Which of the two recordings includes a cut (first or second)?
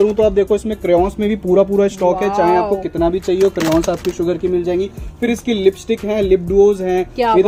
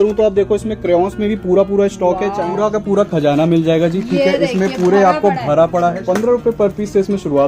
second